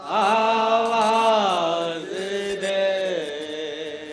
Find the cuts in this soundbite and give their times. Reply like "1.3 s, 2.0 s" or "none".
1.5 s